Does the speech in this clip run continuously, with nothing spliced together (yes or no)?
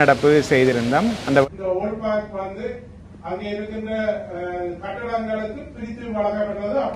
no